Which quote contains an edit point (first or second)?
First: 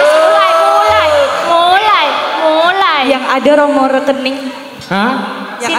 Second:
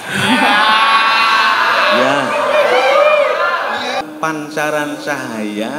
second